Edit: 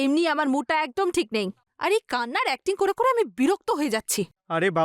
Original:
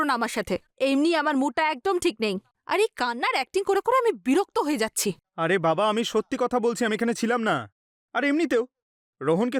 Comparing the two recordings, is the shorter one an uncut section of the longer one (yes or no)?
yes